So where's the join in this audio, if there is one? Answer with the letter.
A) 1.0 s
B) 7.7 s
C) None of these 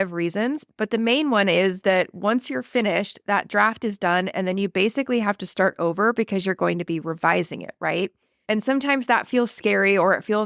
C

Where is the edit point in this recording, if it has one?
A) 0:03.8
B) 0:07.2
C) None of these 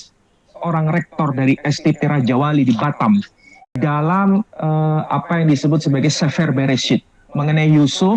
A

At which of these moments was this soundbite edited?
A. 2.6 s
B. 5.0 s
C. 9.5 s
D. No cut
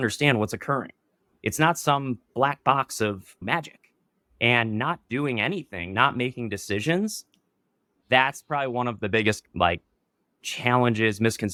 D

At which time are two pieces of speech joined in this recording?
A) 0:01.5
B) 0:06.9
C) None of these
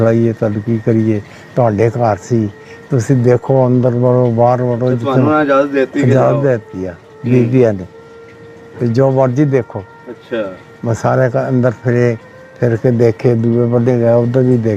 C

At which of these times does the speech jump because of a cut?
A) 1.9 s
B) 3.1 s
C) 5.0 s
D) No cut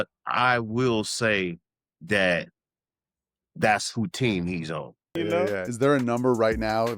C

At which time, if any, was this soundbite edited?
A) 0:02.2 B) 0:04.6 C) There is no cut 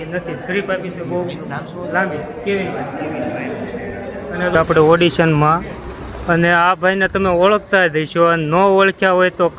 B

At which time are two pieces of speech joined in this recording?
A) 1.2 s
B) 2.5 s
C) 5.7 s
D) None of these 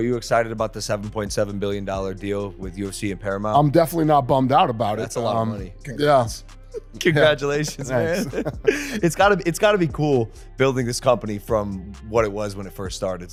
D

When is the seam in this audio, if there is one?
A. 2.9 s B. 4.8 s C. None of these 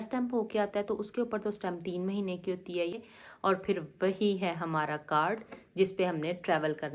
A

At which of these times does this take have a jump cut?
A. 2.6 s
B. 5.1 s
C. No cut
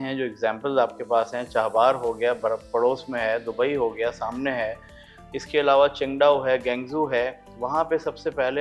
C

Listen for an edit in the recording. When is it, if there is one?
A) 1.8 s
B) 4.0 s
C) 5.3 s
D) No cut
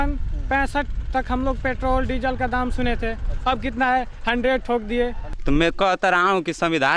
C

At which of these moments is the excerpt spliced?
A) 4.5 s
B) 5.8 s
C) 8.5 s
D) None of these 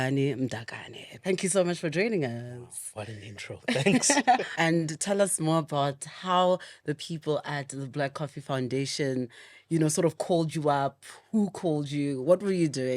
A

